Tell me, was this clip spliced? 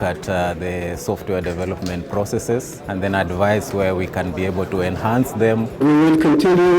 yes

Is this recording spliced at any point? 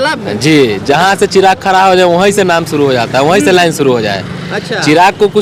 no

